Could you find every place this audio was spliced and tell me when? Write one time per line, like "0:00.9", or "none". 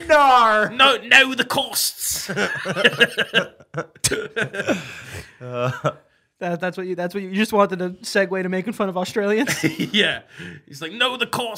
none